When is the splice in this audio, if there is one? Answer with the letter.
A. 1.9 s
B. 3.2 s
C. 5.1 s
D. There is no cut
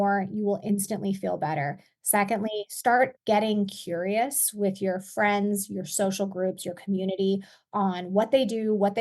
B